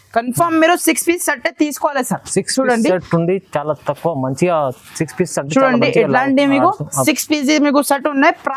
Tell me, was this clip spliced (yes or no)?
no